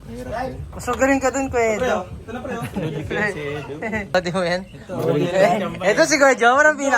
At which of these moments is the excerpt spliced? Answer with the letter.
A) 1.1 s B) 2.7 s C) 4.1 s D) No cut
C